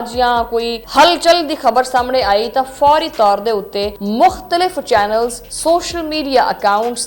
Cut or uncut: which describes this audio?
cut